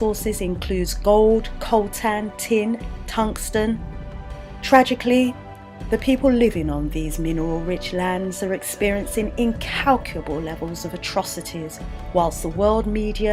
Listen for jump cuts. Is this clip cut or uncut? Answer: uncut